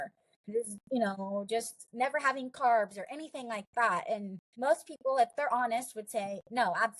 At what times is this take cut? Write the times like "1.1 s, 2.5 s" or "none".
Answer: 4.4 s